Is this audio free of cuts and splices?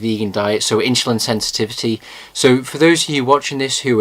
no; 1 cut; at 1.5 s

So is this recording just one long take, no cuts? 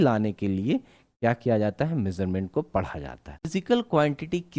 no; 1 cut; at 3.6 s

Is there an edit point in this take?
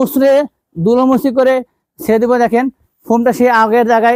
no; 0 cuts

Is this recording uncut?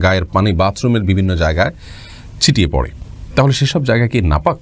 yes; 0 cuts

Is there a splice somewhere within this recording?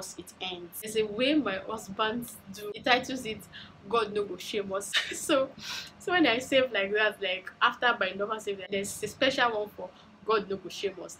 yes; 4 cuts; at 0.9 s, 2.8 s, 4.9 s, 8.7 s

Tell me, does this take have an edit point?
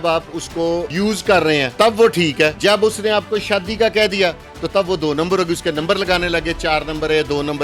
yes; 3 cuts; at 0.9 s, 1.7 s, 2.6 s

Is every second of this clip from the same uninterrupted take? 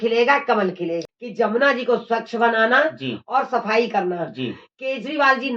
no; 1 cut; at 1.1 s

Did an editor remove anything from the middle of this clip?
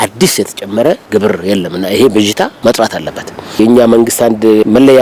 no; 0 cuts

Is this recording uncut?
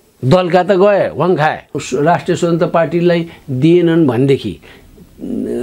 no; 1 cut; at 1.7 s

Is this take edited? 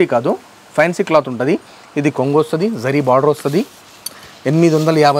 no; 0 cuts

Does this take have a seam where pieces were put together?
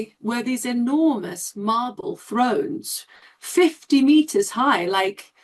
no; 0 cuts

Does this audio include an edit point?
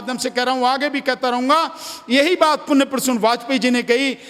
no; 0 cuts

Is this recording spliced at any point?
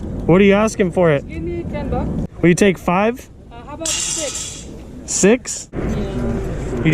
yes; 2 cuts; at 2.2 s, 5.6 s

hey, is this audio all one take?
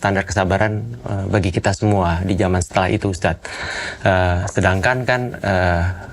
yes; 0 cuts

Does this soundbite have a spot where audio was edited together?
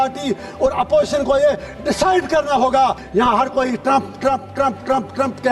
yes; 1 cut; at 3.0 s

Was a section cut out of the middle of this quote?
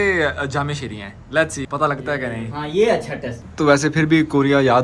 yes; 1 cut; at 3.4 s

